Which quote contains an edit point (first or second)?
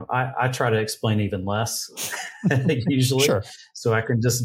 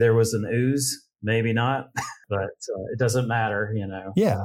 second